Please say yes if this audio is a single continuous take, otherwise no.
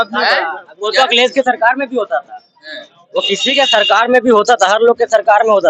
yes